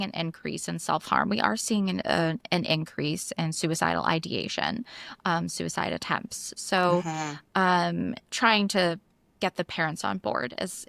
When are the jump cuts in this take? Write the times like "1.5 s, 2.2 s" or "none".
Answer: none